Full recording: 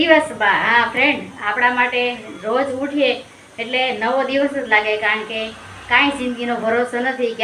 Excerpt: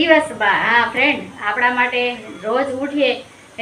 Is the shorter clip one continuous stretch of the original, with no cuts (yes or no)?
yes